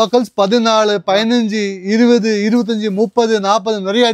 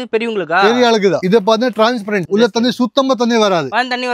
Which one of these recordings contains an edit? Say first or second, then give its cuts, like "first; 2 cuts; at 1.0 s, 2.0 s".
second; 1 cut; at 1.2 s